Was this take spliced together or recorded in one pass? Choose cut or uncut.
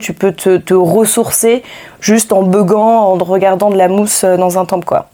uncut